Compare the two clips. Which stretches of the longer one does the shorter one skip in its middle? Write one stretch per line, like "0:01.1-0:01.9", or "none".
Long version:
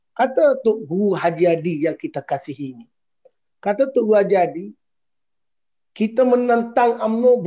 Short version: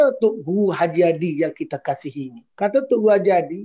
0:02.8-0:03.5

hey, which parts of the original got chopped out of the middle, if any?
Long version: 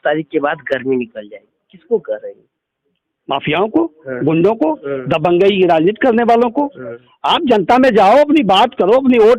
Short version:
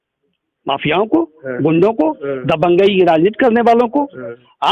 none

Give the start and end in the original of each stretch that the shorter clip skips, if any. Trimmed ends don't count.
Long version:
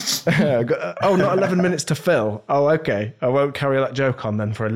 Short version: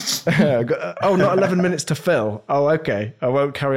none

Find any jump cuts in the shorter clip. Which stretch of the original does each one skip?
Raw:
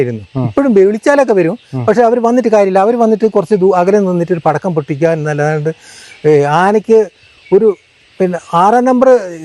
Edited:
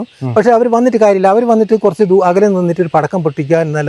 none

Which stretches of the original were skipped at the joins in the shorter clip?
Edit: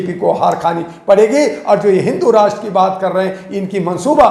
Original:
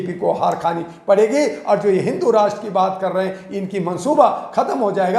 none

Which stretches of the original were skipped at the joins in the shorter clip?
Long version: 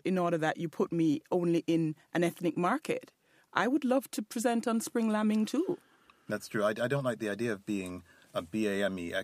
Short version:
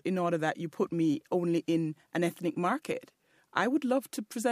none

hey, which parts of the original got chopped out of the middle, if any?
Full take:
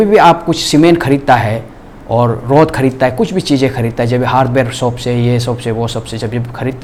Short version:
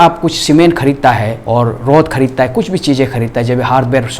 0:01.6-0:02.0

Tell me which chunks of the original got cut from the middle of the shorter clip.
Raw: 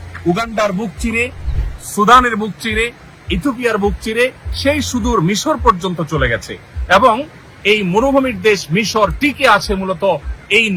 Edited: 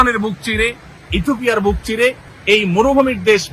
0:04.5-0:07.5

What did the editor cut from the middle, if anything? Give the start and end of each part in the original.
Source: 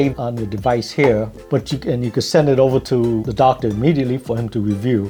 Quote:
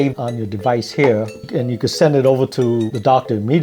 0:01.4-0:01.7

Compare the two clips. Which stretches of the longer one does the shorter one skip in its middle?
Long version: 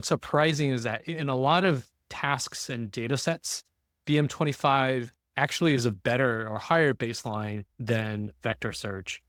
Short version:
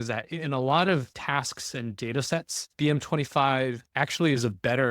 0:01.9-0:02.1
0:03.5-0:03.9
0:05.1-0:05.2

